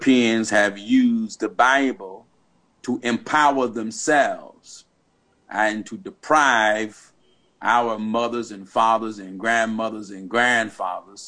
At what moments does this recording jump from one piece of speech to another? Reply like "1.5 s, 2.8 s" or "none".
none